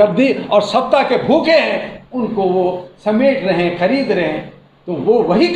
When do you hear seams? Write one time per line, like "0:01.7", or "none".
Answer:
none